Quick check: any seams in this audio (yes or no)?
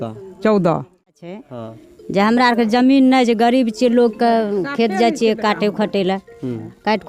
yes